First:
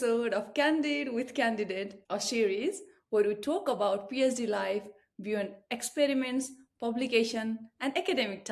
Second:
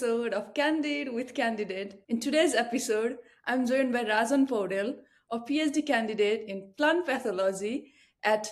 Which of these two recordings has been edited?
second; 1 cut; at 2.0 s

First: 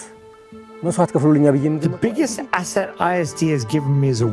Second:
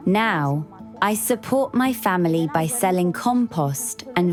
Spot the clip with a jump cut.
first; 1 cut; at 1.7 s

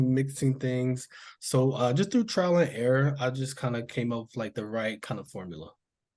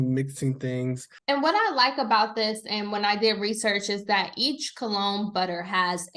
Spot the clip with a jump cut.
second; 1 cut; at 1.1 s

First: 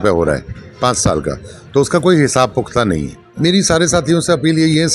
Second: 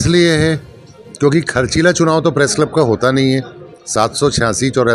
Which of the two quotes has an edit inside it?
first; 1 cut; at 3.2 s

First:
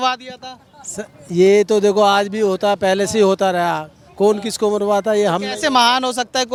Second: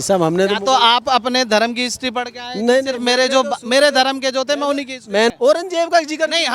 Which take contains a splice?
second; 1 cut; at 5.3 s

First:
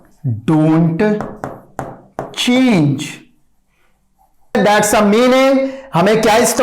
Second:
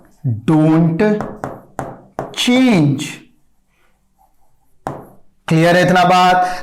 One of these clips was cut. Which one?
first; 1 cut; at 4.5 s

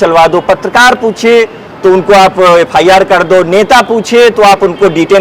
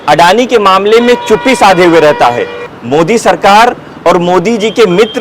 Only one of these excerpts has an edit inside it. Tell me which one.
second; 1 cut; at 2.7 s

